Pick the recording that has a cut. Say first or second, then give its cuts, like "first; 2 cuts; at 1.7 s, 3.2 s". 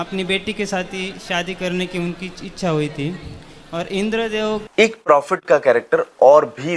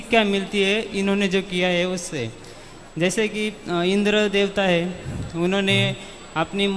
first; 1 cut; at 4.6 s